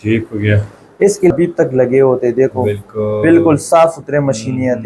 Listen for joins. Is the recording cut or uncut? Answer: cut